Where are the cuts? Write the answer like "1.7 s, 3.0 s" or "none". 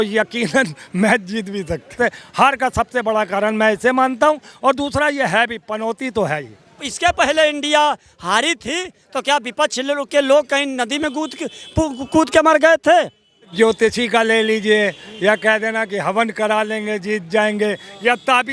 1.9 s, 6.9 s, 13.5 s